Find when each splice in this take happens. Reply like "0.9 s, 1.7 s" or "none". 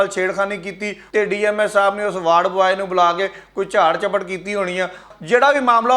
0.9 s, 5.1 s